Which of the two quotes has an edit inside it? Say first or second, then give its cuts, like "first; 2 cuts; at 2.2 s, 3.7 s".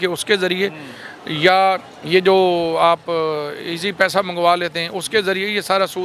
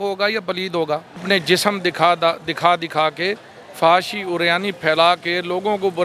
second; 1 cut; at 1.2 s